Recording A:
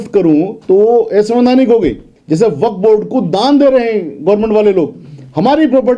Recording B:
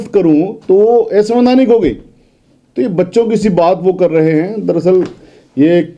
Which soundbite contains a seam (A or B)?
A